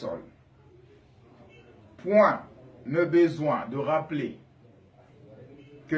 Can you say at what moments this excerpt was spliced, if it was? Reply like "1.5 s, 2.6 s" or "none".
none